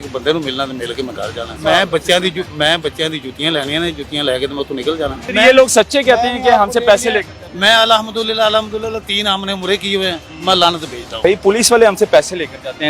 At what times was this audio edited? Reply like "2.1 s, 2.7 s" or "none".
1.5 s, 5.2 s, 11.2 s